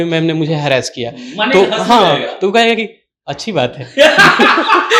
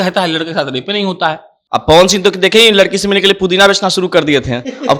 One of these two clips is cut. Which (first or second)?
second